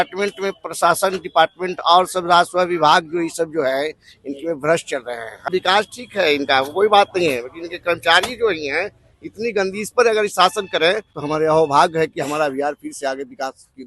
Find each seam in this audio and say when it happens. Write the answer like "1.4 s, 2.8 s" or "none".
5.5 s, 11.1 s